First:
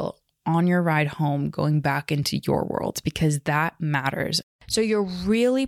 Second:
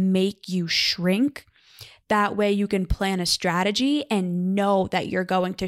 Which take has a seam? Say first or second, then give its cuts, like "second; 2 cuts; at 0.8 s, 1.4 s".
first; 1 cut; at 4.4 s